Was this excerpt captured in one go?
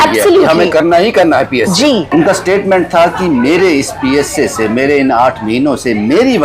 no; 1 cut; at 2.1 s

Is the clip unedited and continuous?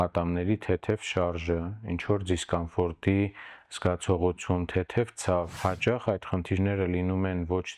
no; 1 cut; at 5.5 s

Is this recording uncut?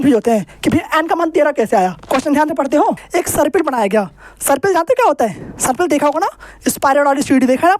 no; 2 cuts; at 2.0 s, 3.0 s

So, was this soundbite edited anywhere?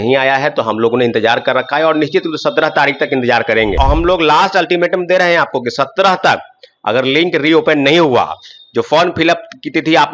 yes; 1 cut; at 3.8 s

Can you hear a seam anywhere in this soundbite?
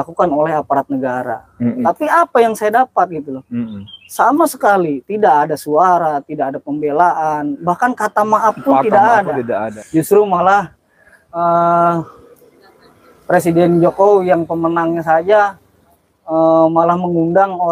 yes; 2 cuts; at 1.8 s, 9.7 s

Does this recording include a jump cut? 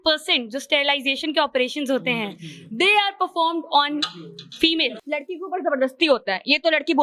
yes; 1 cut; at 5.0 s

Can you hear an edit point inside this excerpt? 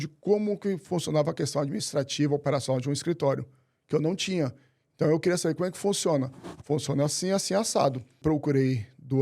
yes; 1 cut; at 8.2 s

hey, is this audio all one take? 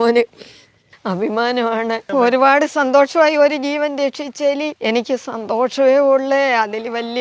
no; 2 cuts; at 2.0 s, 4.7 s

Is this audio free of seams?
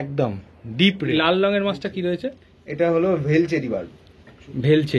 no; 1 cut; at 1.1 s

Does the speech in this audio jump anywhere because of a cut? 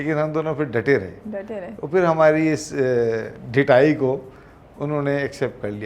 no; 0 cuts

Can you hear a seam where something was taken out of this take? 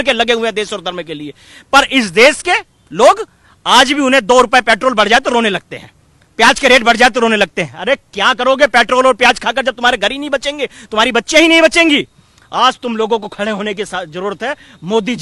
no; 0 cuts

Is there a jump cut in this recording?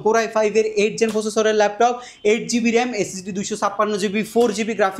no; 0 cuts

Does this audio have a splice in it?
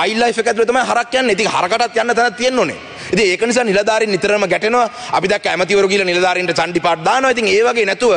no; 0 cuts

